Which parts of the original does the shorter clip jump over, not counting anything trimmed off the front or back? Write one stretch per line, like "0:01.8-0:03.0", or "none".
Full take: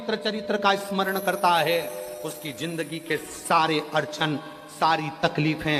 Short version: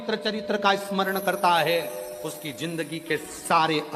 none